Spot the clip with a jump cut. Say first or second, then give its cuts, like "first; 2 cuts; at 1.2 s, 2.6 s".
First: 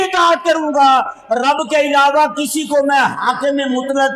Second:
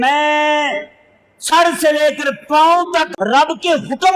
second; 1 cut; at 3.1 s